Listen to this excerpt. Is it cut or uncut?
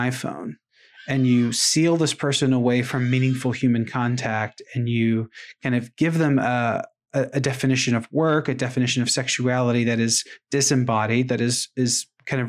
uncut